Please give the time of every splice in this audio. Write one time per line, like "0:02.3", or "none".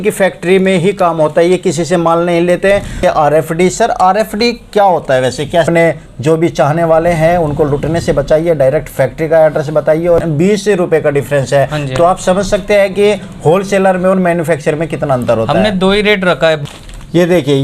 0:03.0
0:05.7
0:10.2
0:16.6